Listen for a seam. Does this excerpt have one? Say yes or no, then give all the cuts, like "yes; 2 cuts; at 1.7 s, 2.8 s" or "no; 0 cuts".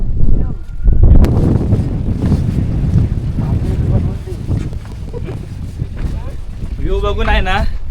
yes; 1 cut; at 1.2 s